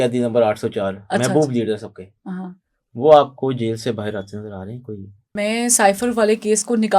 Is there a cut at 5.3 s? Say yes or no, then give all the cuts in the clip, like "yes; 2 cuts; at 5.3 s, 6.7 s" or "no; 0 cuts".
yes; 1 cut; at 5.3 s